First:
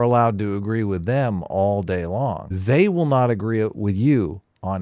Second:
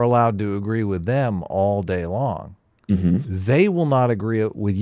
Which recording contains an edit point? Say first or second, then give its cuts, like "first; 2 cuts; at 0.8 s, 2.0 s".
first; 1 cut; at 2.5 s